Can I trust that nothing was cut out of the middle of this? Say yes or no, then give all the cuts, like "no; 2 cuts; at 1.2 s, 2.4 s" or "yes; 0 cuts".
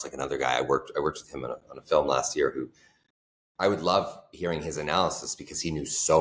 yes; 0 cuts